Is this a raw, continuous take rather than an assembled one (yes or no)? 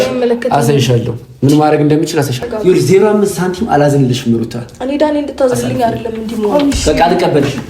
no